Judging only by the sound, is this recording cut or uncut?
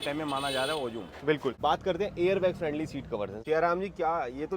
cut